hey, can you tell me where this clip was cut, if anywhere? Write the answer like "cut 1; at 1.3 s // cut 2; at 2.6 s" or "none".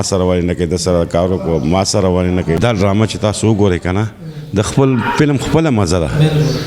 cut 1; at 2.6 s